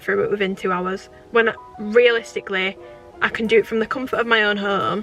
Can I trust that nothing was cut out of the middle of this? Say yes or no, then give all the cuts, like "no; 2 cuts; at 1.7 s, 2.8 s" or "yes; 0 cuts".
no; 1 cut; at 1.1 s